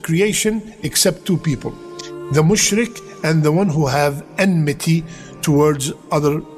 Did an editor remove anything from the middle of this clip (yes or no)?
no